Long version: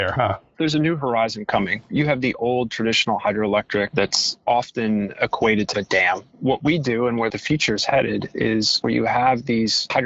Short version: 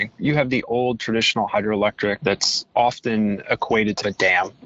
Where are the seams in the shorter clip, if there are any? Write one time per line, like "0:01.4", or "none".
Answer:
none